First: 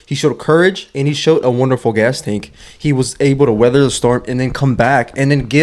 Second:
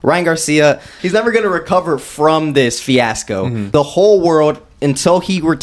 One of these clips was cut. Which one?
second; 2 cuts; at 1.0 s, 3.6 s

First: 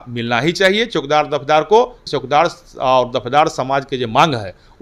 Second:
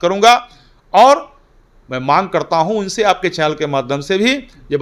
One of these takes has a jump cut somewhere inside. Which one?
first; 1 cut; at 2.0 s

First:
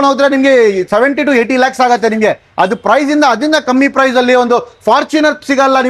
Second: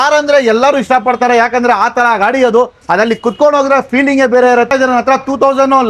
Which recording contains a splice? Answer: second; 1 cut; at 4.7 s

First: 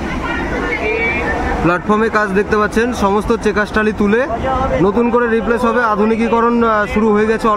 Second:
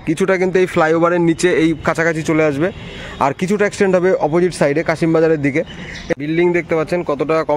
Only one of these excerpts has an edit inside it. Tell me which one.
second; 1 cut; at 6.1 s

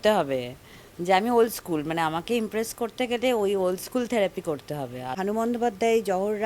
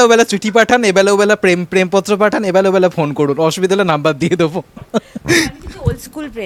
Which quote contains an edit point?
first; 1 cut; at 5.1 s

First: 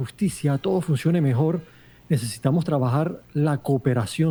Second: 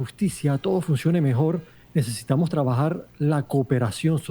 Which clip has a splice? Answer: second; 1 cut; at 1.7 s

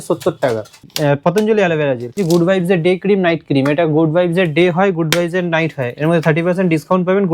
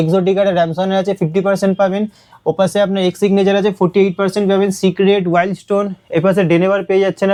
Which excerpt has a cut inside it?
first; 2 cuts; at 0.9 s, 2.2 s

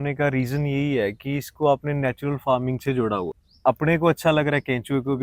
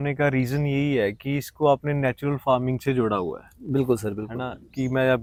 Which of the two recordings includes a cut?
first; 1 cut; at 3.4 s

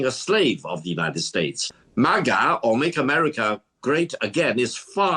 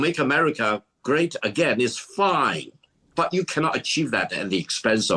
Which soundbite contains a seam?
first; 1 cut; at 1.7 s

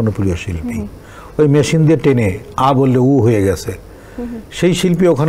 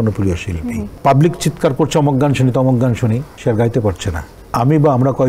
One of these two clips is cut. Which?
second; 3 cuts; at 0.9 s, 3.3 s, 4.3 s

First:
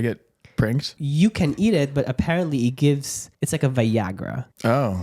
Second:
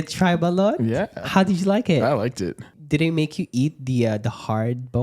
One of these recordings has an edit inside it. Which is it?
second; 1 cut; at 2.6 s

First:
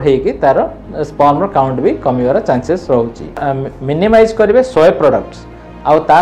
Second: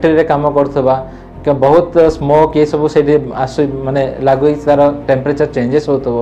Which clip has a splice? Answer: first; 1 cut; at 3.5 s

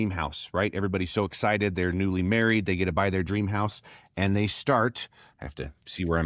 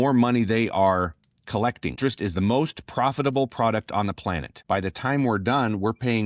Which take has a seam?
second; 2 cuts; at 2.0 s, 4.5 s

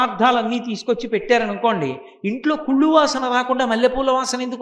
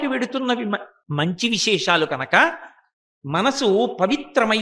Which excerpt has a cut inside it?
second; 1 cut; at 1.0 s

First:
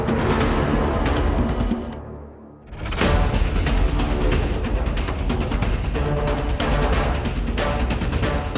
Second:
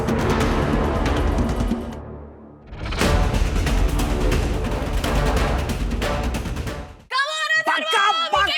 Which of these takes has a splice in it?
second; 2 cuts; at 4.9 s, 6.7 s

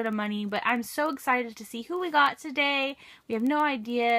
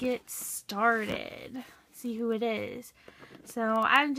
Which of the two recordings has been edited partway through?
first; 1 cut; at 1.4 s

